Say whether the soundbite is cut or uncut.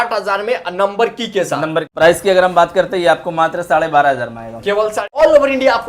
cut